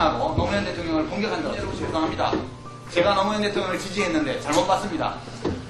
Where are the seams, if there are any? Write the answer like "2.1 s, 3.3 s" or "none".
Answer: 1.7 s